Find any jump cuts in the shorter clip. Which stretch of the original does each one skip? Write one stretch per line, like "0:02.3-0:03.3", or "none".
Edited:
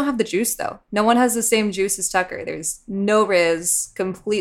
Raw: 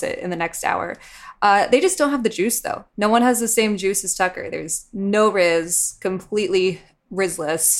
none